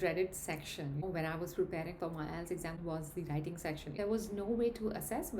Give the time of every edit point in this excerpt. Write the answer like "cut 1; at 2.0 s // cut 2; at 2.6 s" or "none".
cut 1; at 1.0 s // cut 2; at 2.8 s // cut 3; at 4.0 s